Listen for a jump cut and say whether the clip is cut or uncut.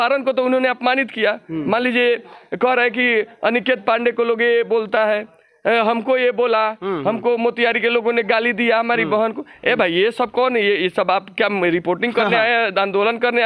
uncut